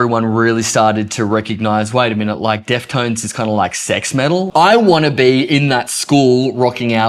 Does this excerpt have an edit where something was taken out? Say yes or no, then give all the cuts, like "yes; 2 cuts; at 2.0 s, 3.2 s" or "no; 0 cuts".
yes; 1 cut; at 4.5 s